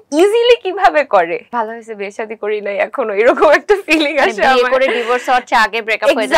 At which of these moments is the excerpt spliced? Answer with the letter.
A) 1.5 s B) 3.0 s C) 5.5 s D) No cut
A